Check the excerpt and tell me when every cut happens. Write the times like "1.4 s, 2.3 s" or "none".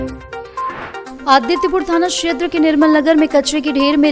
none